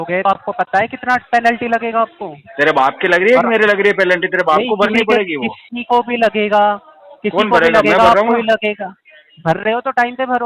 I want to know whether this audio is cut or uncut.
uncut